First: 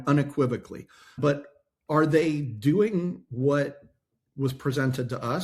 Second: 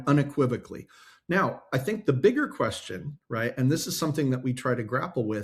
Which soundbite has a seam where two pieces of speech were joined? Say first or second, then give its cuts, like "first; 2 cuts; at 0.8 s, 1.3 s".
first; 1 cut; at 1.2 s